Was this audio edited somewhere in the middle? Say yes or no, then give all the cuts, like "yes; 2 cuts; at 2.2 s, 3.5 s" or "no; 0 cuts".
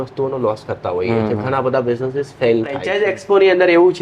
yes; 1 cut; at 2.9 s